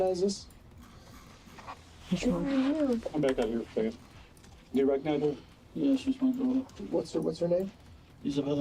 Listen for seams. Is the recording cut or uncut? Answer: cut